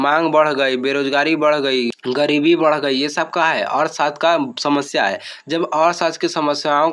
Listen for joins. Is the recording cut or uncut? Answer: uncut